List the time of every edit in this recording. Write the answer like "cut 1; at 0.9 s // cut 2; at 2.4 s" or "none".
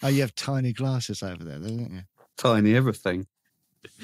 cut 1; at 2.3 s